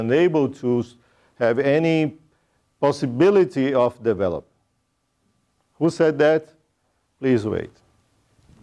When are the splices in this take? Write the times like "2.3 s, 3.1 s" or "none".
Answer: none